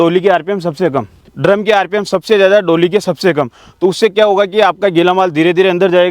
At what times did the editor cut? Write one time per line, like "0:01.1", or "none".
0:01.3

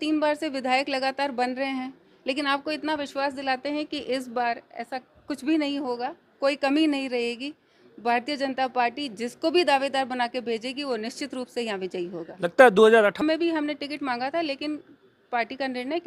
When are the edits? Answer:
0:13.2

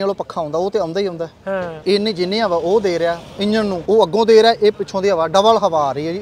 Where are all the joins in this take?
0:01.7
0:03.8

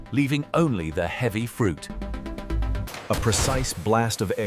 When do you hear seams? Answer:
0:02.8

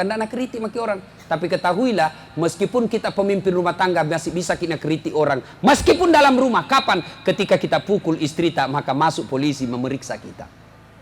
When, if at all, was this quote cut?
none

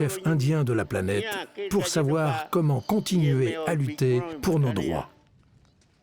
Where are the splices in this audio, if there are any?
0:04.3
0:05.2

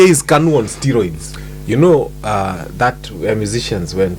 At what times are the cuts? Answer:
0:01.3

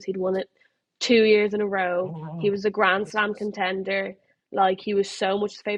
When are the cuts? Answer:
none

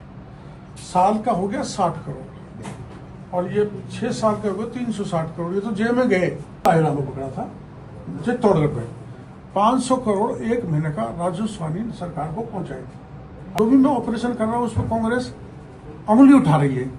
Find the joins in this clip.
0:06.6
0:13.6

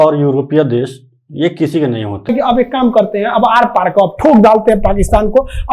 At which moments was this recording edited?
0:02.3

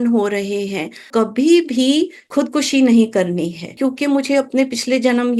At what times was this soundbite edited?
0:01.1
0:02.3
0:03.7

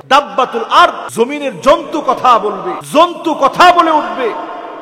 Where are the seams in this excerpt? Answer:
0:01.0
0:02.7

